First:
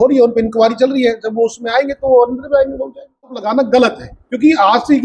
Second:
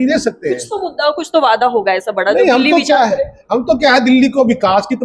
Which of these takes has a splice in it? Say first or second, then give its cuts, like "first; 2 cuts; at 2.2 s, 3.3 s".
first; 1 cut; at 3.4 s